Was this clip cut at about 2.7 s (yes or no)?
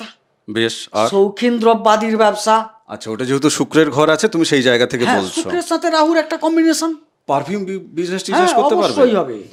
no